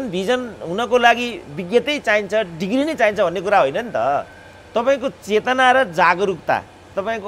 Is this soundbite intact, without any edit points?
yes; 0 cuts

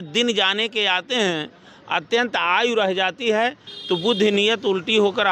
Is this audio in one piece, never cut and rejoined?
yes; 0 cuts

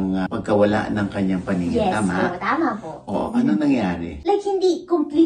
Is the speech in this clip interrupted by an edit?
yes; 1 cut; at 4.1 s

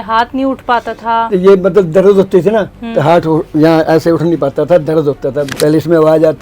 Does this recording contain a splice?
yes; 1 cut; at 5.5 s

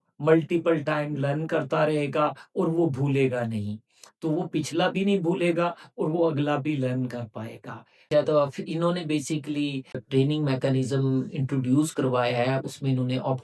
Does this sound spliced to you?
yes; 1 cut; at 8.1 s

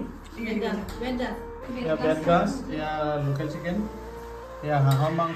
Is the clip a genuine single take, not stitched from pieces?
yes; 0 cuts

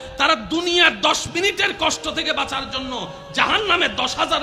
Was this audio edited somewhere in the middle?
no; 0 cuts

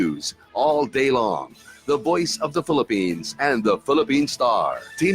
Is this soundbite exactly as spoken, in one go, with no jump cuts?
no; 1 cut; at 2.1 s

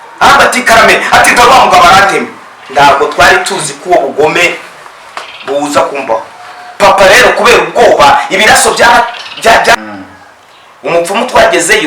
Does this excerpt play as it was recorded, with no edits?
no; 1 cut; at 9.7 s

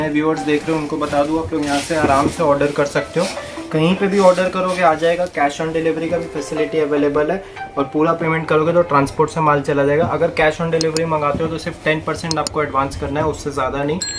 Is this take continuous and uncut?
yes; 0 cuts

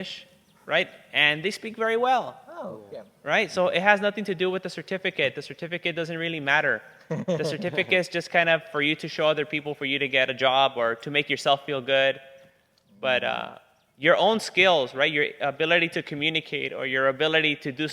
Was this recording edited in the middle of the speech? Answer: no; 0 cuts

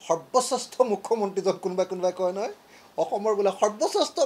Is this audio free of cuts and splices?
yes; 0 cuts

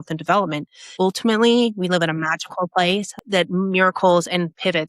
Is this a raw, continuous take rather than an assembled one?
no; 2 cuts; at 0.9 s, 3.2 s

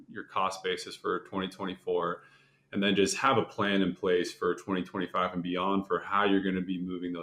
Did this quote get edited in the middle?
no; 0 cuts

